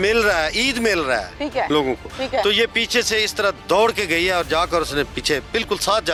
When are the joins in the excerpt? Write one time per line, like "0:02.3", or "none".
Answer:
none

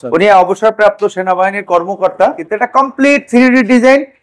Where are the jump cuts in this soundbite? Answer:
0:02.4

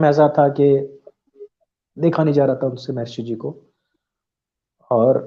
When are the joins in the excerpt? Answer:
none

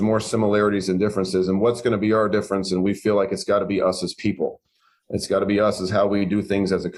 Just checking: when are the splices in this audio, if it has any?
none

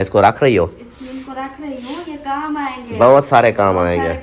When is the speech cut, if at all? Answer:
none

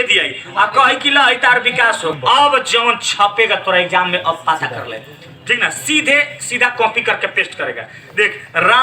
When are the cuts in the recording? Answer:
0:02.2

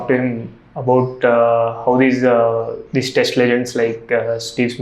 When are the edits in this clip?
none

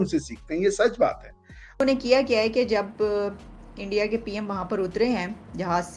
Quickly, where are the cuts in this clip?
0:01.8

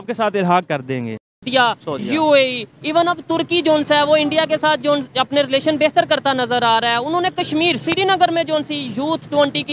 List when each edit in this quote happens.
0:01.5

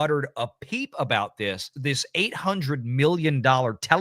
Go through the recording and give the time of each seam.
0:01.7

